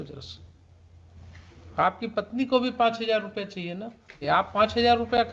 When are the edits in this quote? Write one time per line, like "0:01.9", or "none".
0:04.2